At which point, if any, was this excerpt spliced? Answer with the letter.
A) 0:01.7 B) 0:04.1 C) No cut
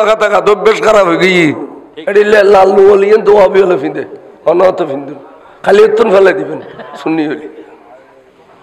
A